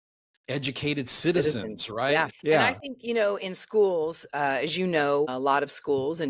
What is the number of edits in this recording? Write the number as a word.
two